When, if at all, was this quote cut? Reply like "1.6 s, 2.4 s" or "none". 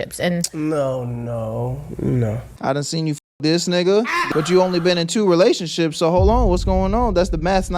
2.5 s, 4.3 s

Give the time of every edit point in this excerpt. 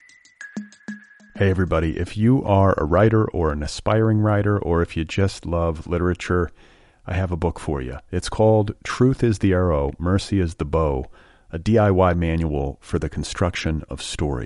0.9 s

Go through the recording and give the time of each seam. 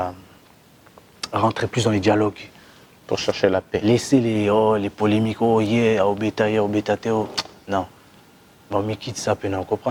none

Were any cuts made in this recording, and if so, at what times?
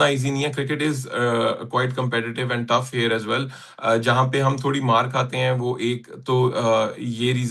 none

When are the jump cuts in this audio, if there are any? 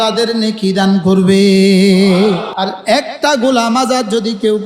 2.5 s

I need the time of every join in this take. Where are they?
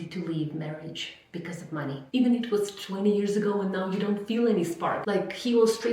2.0 s, 5.0 s

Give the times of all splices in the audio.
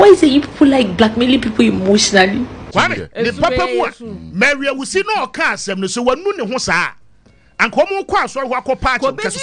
2.6 s

